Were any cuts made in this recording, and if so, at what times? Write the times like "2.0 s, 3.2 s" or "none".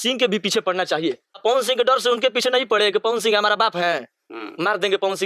1.4 s